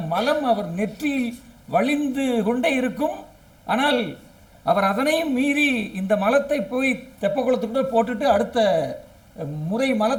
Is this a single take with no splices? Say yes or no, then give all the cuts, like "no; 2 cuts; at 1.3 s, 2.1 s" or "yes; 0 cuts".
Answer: yes; 0 cuts